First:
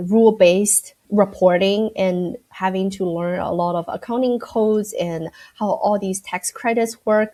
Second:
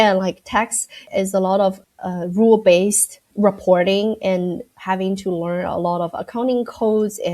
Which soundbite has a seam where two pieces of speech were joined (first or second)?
second